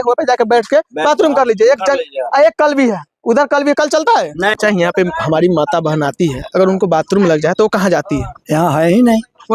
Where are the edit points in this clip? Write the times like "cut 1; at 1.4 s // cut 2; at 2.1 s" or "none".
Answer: cut 1; at 4.6 s